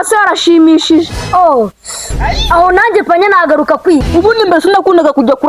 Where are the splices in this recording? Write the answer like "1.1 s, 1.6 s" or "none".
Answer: 4.1 s